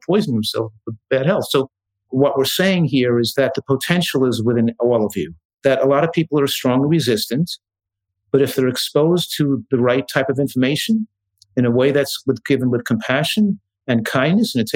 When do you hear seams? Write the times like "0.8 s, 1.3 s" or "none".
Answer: 1.0 s, 2.1 s, 3.3 s, 5.4 s